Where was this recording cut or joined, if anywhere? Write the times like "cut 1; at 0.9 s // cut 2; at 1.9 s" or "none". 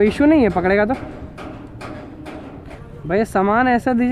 cut 1; at 2.6 s

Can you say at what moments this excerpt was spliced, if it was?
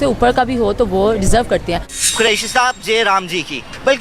cut 1; at 2.1 s

